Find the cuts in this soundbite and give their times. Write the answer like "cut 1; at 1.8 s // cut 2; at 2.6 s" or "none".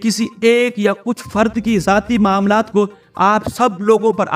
none